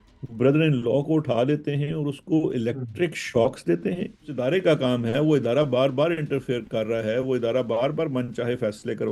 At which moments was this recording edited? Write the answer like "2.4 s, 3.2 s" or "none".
4.4 s